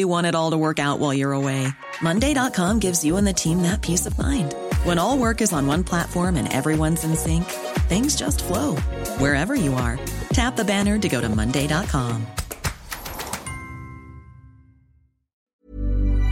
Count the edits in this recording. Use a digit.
1